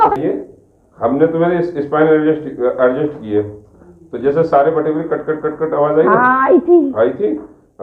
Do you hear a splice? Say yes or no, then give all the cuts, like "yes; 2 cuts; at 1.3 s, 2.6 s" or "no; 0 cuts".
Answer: no; 0 cuts